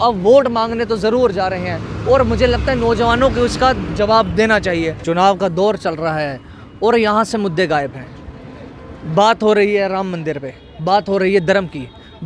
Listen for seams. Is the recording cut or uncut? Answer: cut